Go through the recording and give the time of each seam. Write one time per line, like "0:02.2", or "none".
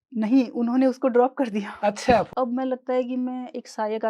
0:02.3